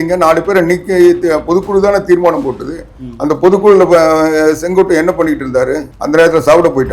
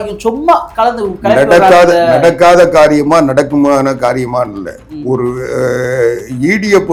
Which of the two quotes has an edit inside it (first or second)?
first